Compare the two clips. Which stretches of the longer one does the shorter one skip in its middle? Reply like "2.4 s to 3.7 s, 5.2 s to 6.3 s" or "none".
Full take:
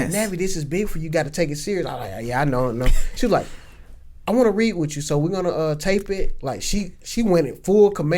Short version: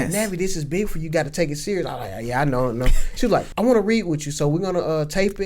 3.5 s to 4.2 s